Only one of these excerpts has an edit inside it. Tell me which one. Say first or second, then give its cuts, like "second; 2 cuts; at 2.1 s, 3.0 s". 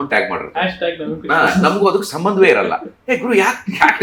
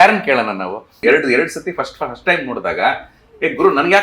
second; 1 cut; at 1.0 s